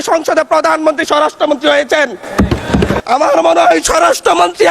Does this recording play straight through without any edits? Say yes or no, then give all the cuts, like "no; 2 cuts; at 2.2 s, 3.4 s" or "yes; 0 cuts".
no; 1 cut; at 3.0 s